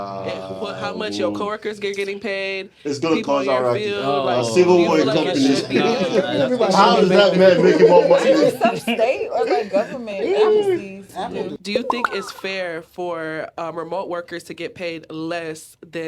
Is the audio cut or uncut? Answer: cut